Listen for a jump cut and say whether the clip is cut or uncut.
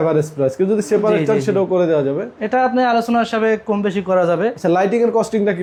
uncut